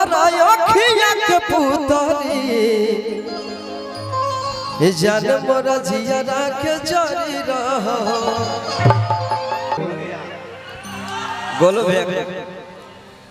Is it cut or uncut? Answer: cut